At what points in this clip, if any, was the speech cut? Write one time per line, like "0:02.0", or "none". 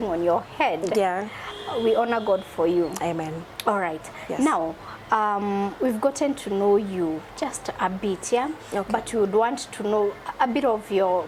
none